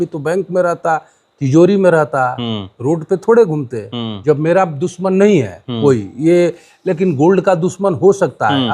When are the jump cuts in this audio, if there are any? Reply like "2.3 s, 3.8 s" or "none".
4.1 s